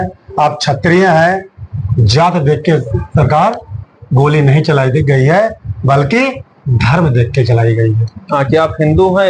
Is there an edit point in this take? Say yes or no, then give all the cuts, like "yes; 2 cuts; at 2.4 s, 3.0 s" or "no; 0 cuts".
no; 0 cuts